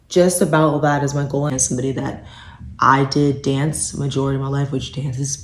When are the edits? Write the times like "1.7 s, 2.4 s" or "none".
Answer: 1.5 s